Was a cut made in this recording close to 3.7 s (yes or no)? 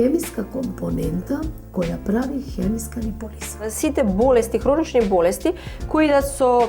yes